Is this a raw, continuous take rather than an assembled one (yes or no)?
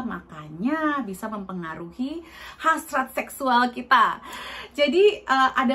yes